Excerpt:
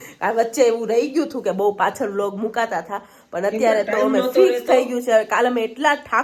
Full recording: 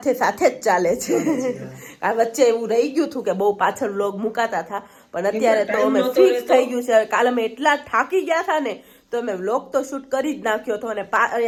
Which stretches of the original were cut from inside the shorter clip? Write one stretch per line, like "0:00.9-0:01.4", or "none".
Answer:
none